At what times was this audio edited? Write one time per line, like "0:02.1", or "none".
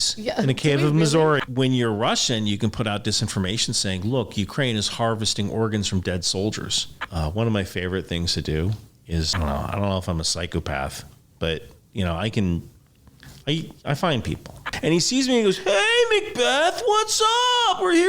0:01.4
0:07.0
0:09.3
0:14.7